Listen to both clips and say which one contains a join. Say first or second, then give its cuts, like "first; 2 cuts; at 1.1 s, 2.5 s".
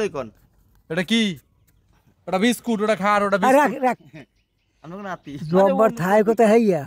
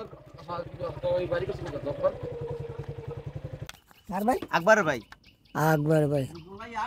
second; 1 cut; at 3.6 s